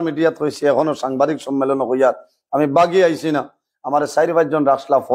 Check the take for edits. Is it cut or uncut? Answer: uncut